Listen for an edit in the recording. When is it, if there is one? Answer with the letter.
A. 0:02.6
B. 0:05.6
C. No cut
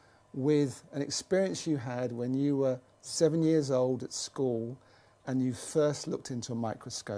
C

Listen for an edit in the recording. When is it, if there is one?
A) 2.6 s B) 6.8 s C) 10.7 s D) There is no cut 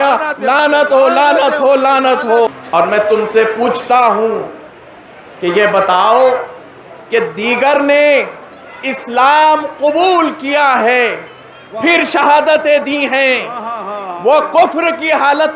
A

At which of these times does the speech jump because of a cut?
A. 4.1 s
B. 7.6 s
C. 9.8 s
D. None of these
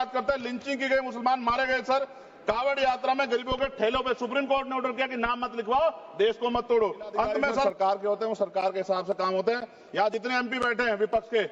B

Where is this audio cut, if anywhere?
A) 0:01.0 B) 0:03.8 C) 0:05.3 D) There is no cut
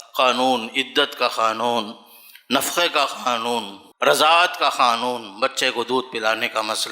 B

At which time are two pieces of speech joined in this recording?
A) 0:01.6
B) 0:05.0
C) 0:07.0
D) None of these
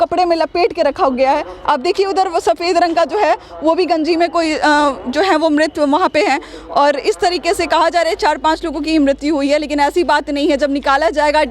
D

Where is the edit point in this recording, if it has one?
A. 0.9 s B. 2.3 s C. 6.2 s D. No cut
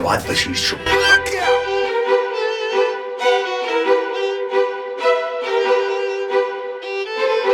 D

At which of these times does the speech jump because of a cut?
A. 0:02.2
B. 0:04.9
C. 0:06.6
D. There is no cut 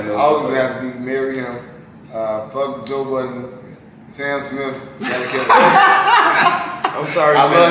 D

